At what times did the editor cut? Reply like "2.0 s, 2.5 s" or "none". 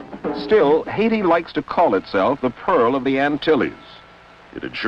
3.1 s